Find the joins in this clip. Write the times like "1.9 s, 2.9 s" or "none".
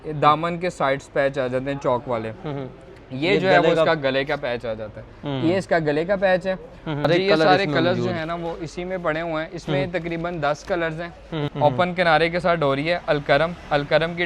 7.1 s, 11.4 s

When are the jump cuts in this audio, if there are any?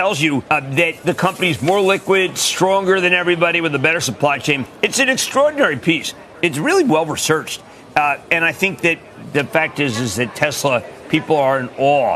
none

